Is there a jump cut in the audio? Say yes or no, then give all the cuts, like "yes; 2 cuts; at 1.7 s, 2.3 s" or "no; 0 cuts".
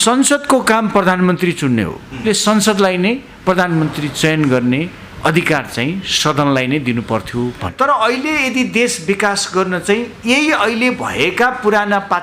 yes; 2 cuts; at 2.3 s, 7.6 s